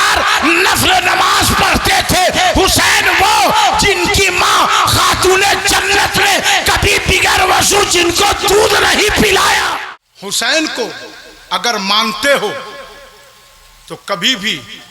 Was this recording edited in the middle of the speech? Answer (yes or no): yes